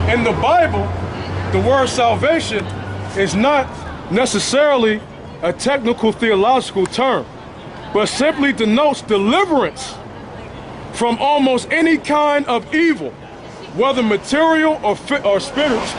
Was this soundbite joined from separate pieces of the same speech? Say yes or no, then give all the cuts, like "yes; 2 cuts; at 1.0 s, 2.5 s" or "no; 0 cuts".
no; 0 cuts